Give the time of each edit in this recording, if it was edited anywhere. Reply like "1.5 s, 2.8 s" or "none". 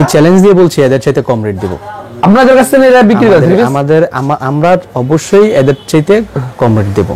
none

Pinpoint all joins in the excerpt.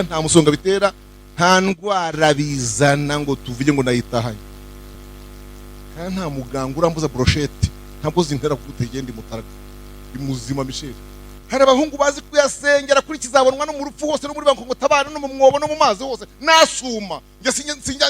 4.9 s, 11.4 s

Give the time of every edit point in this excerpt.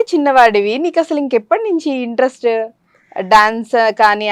none

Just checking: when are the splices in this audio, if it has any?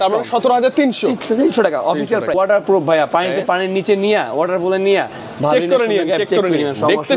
2.4 s

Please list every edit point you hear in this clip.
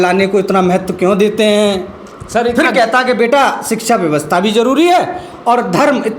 none

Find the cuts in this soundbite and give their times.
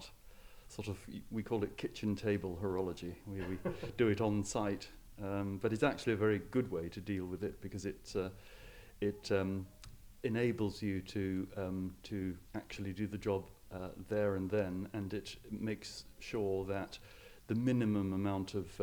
none

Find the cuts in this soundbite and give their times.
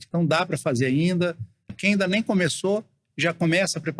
1.7 s

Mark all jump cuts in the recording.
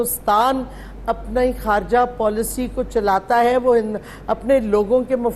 none

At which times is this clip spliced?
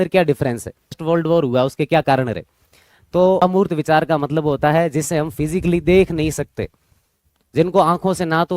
1.0 s, 3.4 s

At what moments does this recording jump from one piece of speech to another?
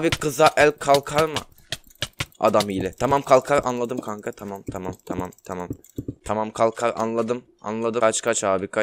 6.2 s, 8.0 s

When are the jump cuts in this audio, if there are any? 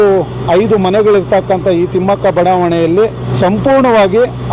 3.2 s

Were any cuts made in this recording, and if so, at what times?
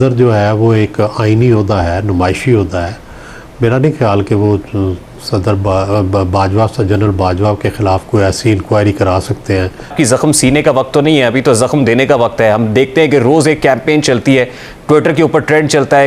9.9 s

